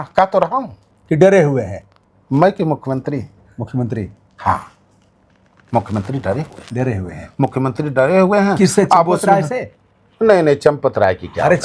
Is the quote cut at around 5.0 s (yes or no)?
no